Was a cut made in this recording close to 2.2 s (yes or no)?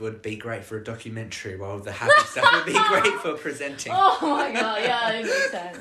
no